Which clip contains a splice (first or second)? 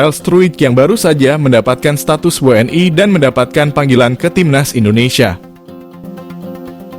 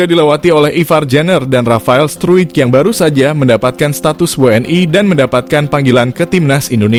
first